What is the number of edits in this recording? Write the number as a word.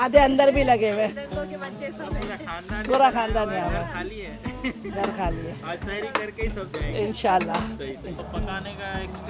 one